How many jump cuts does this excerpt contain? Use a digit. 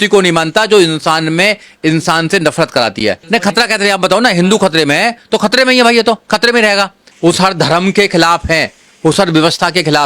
2